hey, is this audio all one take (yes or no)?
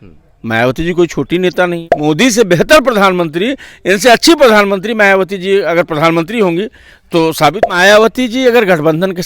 no